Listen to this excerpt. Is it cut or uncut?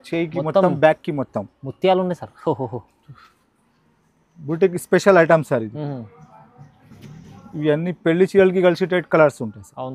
uncut